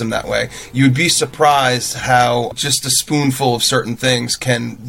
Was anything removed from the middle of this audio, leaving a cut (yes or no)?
yes